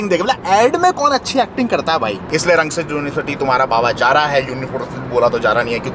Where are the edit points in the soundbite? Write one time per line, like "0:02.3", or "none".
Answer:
none